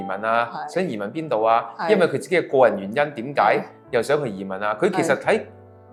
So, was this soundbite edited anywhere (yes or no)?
no